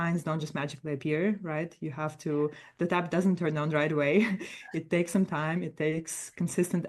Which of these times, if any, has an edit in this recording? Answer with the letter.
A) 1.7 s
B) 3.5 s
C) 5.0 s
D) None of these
D